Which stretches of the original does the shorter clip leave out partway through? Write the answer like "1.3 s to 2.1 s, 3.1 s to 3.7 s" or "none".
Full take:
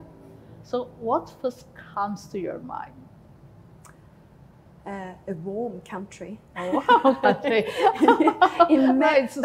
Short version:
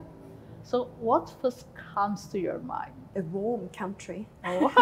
3.0 s to 5.2 s